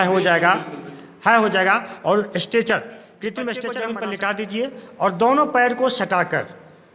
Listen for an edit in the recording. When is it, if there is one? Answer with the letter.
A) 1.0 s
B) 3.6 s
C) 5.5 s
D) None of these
B